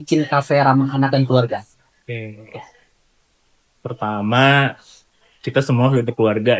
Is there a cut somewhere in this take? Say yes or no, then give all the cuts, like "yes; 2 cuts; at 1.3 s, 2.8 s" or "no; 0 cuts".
no; 0 cuts